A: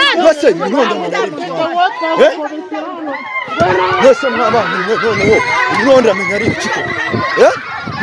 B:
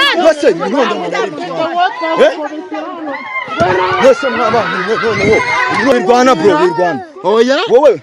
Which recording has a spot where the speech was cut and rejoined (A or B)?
B